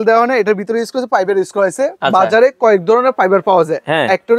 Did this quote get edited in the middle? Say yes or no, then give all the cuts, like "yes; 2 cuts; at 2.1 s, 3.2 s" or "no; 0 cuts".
no; 0 cuts